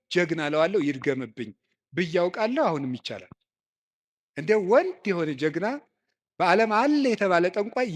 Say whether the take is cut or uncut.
uncut